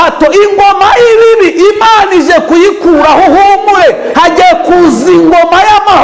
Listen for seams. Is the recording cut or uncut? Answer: uncut